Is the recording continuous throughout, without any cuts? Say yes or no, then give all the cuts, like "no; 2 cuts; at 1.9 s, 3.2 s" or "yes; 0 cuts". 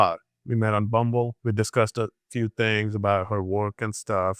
yes; 0 cuts